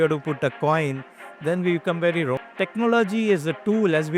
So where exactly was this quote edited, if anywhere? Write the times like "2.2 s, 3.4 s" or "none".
2.4 s